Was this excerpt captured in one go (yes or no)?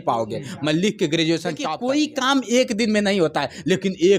no